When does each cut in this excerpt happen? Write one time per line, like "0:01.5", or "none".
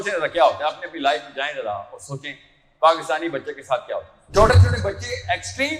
0:04.2